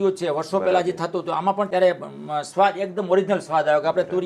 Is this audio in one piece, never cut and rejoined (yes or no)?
no